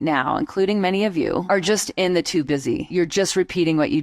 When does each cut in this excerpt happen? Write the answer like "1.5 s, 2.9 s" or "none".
1.4 s, 2.9 s